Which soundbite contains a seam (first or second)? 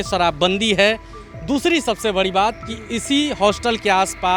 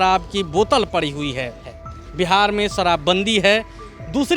second